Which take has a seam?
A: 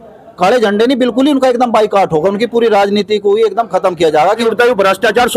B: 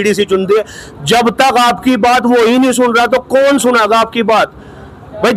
A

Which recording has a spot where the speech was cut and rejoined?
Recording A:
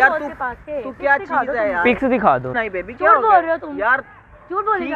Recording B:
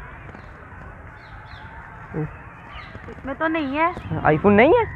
A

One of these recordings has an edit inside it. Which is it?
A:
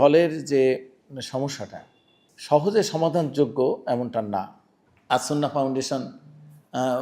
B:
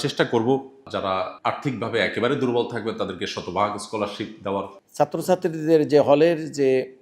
B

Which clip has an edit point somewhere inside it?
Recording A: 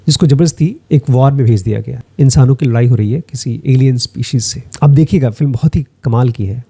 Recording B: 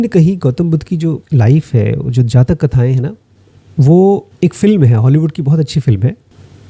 A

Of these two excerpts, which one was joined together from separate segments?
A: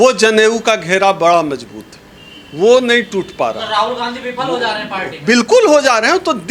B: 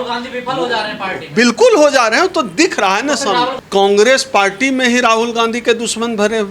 B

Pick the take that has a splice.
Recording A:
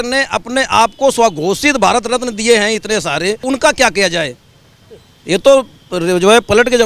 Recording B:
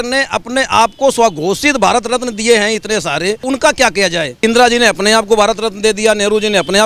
B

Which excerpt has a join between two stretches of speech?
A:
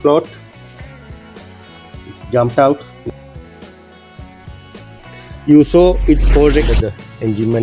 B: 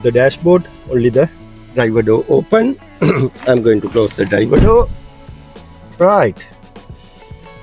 A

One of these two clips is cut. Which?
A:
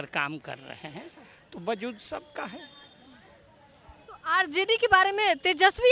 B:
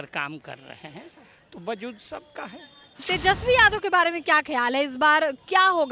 B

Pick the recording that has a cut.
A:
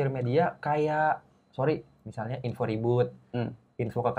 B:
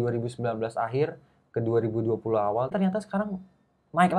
B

